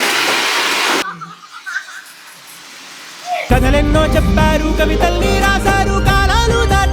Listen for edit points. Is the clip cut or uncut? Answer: cut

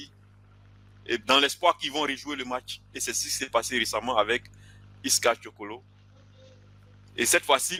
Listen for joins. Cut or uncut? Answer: uncut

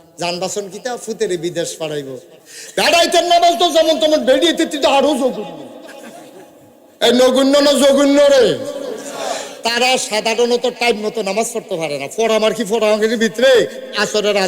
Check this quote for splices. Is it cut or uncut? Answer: cut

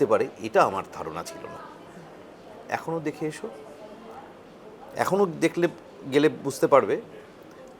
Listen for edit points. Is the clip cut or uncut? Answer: uncut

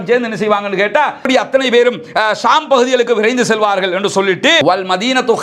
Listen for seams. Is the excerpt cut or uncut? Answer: uncut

